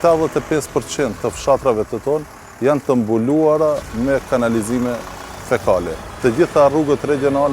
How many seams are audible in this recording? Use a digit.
1